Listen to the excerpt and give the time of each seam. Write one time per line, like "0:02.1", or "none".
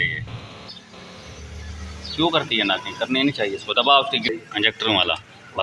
0:04.2